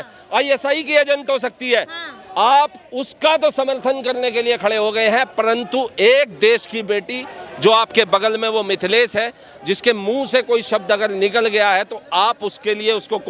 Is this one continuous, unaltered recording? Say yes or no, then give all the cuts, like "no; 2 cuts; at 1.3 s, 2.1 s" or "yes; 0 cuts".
yes; 0 cuts